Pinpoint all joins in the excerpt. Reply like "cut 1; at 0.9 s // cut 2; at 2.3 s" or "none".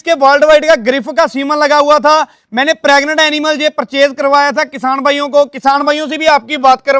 none